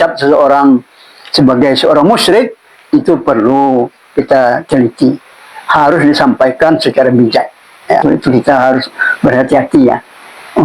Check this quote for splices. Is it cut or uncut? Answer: cut